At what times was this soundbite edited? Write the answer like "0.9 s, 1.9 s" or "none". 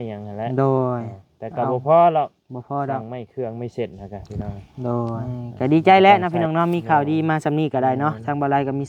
5.2 s